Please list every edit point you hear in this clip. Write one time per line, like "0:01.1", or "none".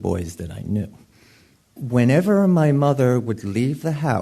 0:01.8